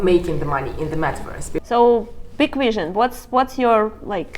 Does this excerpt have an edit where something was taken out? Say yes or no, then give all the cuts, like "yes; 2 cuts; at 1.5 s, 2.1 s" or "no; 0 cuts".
yes; 1 cut; at 1.5 s